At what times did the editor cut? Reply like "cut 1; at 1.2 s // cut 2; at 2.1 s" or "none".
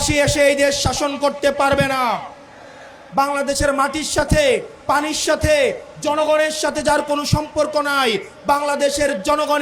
cut 1; at 3.0 s